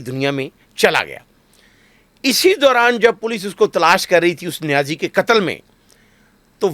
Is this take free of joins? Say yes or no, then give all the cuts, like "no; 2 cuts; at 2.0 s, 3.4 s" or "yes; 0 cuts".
yes; 0 cuts